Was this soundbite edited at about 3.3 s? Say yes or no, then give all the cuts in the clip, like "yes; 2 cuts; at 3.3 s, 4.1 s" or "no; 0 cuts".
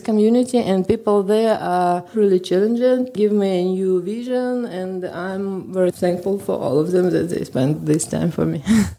no; 1 cut; at 2.1 s